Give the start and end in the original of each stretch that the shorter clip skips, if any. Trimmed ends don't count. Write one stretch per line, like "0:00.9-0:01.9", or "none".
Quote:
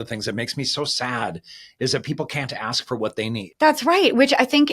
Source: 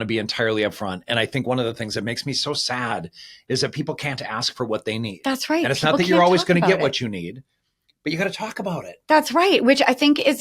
0:05.2-0:09.0